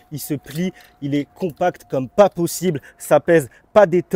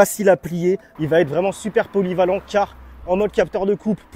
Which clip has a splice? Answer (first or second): second